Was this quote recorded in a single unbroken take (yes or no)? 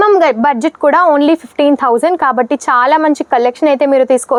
yes